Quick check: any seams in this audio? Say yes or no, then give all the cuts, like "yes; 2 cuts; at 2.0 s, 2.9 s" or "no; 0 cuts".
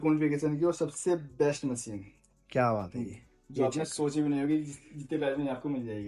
no; 0 cuts